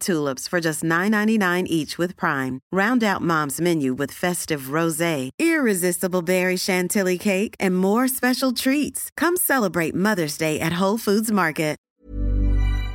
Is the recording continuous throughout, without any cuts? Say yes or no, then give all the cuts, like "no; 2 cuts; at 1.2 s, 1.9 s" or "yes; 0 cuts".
no; 1 cut; at 11.9 s